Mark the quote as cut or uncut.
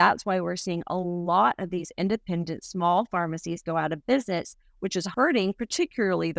cut